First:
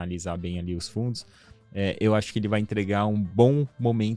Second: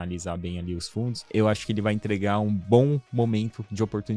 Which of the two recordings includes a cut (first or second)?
second